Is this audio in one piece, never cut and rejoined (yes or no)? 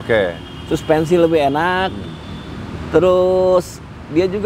yes